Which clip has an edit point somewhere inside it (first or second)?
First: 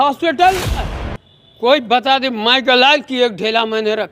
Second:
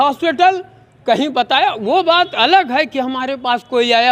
first